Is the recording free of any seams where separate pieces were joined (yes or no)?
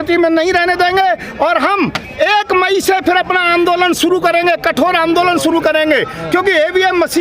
yes